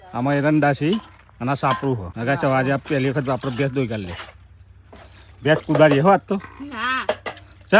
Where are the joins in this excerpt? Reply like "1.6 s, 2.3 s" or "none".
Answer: 2.1 s